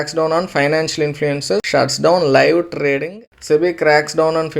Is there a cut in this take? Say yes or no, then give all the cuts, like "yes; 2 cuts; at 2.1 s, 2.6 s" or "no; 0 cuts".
yes; 2 cuts; at 1.7 s, 3.3 s